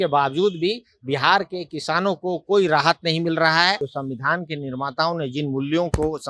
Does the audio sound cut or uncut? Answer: cut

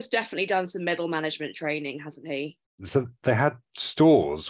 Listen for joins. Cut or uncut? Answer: cut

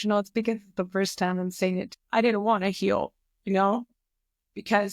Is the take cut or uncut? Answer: cut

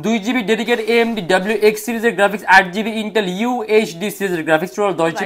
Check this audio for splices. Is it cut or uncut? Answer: uncut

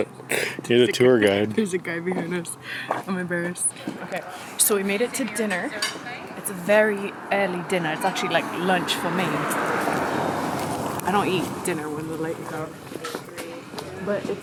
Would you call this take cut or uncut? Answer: uncut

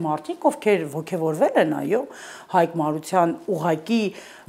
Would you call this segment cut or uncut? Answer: uncut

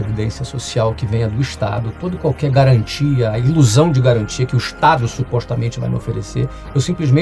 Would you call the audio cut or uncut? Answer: uncut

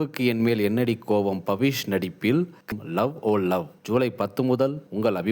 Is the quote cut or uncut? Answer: cut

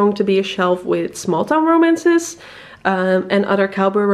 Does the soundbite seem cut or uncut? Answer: uncut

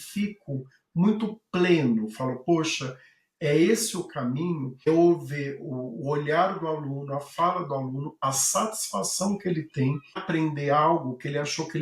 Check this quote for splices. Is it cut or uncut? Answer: uncut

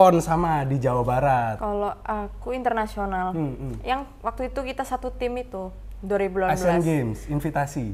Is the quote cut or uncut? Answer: cut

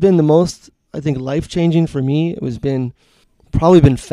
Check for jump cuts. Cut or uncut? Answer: uncut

